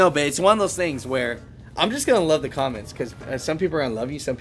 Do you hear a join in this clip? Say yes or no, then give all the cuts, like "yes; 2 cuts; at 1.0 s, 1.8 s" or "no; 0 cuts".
no; 0 cuts